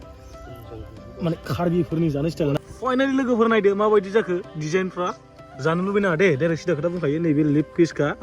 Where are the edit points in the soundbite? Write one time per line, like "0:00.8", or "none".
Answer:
0:02.6